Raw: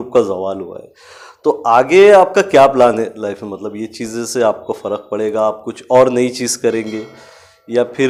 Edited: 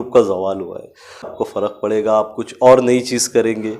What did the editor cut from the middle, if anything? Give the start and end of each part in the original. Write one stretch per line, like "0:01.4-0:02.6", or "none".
0:01.3-0:04.6